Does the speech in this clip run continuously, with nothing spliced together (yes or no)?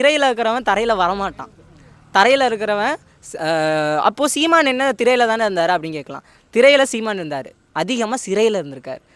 yes